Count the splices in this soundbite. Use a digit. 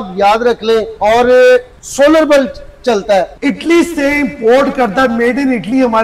3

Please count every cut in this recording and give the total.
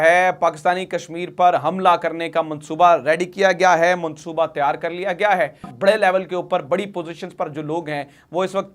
1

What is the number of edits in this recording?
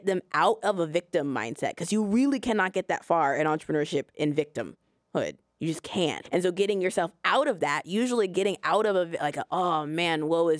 1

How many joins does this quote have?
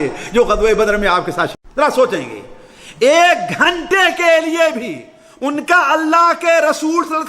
1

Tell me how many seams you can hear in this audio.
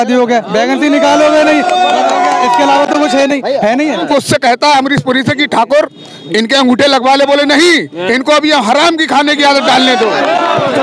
1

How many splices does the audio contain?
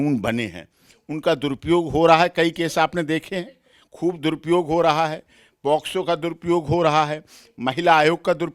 0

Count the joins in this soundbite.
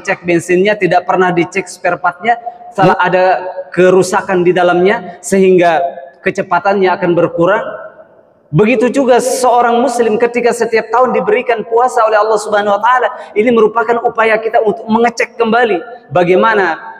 1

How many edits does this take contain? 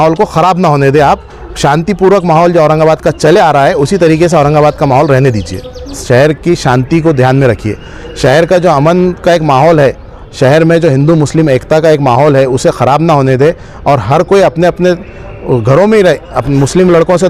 1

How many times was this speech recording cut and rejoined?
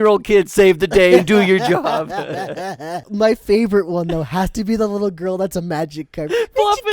1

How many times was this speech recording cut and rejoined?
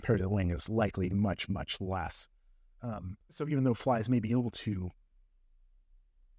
1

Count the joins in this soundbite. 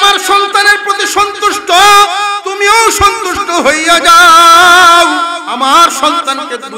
2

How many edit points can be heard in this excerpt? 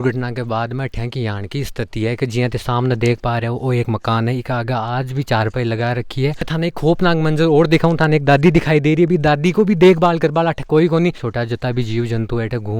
2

